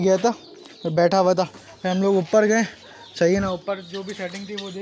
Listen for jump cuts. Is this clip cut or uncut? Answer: uncut